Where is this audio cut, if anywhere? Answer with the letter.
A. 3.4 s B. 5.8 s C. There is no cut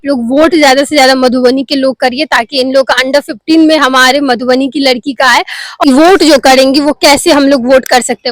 B